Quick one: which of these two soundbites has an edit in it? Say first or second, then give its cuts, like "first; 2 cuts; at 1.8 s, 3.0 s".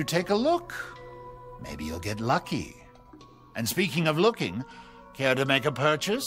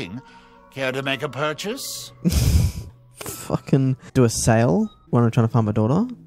second; 2 cuts; at 4.0 s, 5.0 s